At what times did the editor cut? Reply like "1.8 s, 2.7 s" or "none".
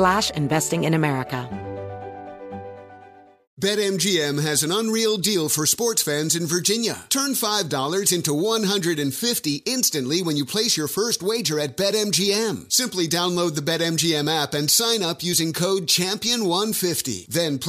1.4 s